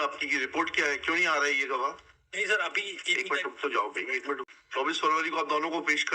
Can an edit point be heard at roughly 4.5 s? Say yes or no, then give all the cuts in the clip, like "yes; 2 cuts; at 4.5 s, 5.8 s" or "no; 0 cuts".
yes; 1 cut; at 4.5 s